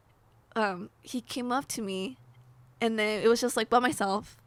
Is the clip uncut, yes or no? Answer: yes